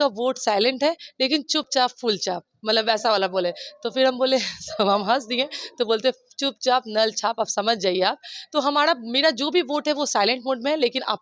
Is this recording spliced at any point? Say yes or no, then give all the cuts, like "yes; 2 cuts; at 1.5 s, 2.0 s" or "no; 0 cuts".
no; 0 cuts